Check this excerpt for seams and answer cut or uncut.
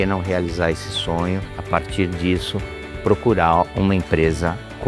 cut